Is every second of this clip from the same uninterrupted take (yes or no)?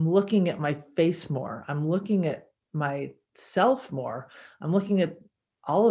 yes